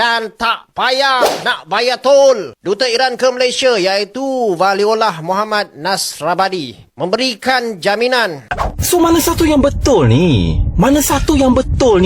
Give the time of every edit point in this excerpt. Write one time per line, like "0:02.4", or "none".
0:08.7